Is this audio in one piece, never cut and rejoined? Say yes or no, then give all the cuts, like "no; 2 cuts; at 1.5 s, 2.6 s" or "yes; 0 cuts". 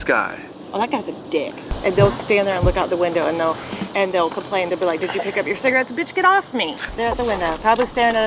no; 2 cuts; at 1.8 s, 6.9 s